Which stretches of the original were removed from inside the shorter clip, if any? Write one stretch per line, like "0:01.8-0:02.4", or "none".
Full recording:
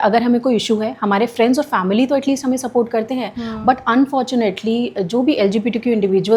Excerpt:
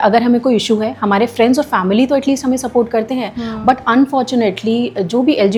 none